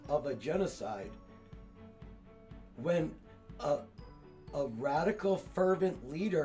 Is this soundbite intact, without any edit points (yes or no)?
yes